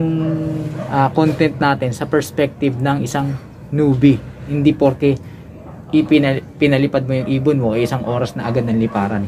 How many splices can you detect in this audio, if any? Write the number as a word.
one